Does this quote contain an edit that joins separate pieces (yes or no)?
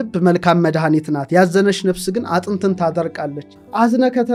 no